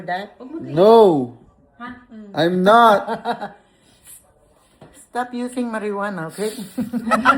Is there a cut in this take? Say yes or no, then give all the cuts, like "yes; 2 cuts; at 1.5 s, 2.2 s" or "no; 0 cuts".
no; 0 cuts